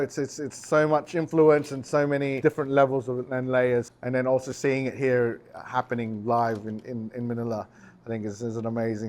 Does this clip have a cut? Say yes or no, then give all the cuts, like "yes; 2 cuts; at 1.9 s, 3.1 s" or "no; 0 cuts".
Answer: yes; 2 cuts; at 2.3 s, 3.9 s